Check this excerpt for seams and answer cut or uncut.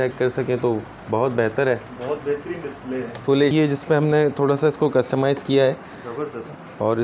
cut